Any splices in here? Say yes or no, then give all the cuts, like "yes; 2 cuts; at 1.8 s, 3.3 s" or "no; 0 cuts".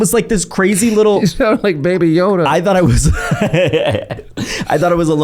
no; 0 cuts